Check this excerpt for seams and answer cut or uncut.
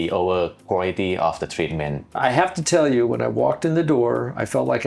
cut